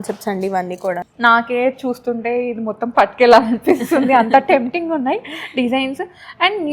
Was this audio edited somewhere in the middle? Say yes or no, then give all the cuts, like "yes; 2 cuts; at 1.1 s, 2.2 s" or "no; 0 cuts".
yes; 1 cut; at 1.1 s